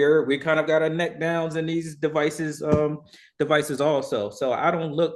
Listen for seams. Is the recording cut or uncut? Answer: uncut